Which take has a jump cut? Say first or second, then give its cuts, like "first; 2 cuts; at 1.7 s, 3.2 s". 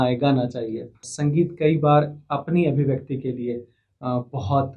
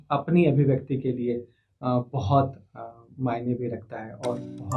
first; 1 cut; at 1.1 s